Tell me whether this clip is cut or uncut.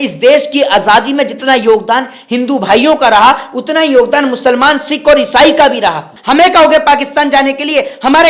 cut